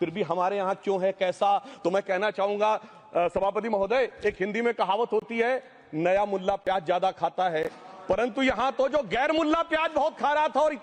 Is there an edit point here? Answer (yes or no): no